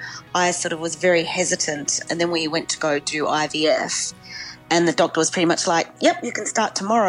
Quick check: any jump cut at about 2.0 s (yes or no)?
yes